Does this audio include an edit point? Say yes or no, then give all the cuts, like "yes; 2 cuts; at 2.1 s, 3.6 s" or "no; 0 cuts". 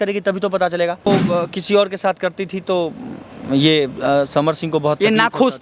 yes; 1 cut; at 1.1 s